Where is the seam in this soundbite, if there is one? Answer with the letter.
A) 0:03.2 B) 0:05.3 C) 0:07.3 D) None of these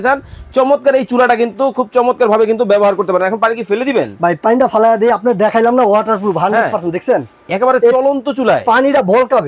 D